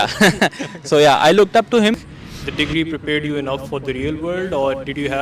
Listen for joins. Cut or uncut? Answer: cut